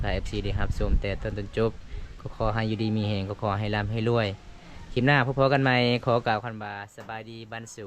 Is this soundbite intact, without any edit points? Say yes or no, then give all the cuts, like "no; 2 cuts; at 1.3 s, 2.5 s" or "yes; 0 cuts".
yes; 0 cuts